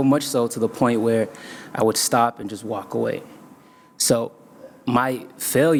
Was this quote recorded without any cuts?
yes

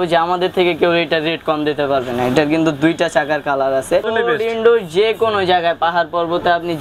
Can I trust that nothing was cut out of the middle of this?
no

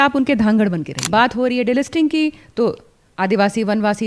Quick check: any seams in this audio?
yes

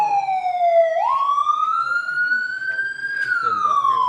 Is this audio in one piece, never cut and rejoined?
no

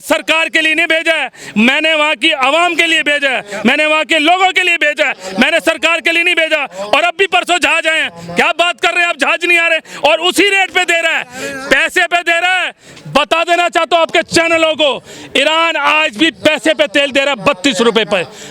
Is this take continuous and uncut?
yes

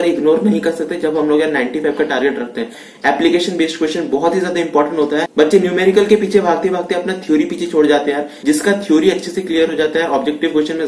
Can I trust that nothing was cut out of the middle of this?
no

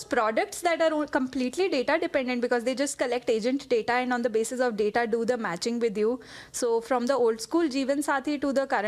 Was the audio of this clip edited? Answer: no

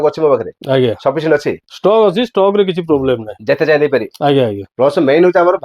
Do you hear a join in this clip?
yes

